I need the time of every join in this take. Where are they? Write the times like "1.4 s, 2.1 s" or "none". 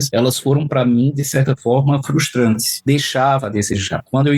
2.7 s

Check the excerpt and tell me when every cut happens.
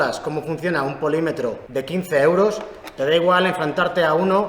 none

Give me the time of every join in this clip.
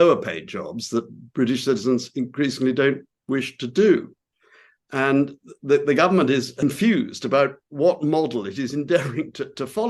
6.6 s

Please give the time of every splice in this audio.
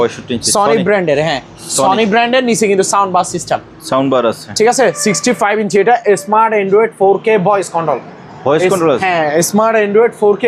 none

